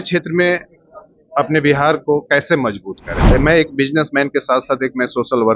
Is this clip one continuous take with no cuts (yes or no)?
no